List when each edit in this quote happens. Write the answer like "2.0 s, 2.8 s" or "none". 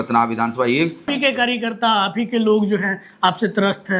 1.1 s